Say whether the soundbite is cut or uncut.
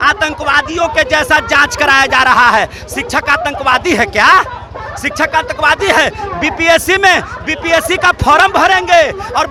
uncut